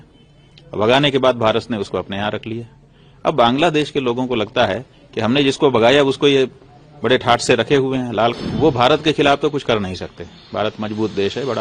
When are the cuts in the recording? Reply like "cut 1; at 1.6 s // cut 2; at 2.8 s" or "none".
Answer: cut 1; at 8.3 s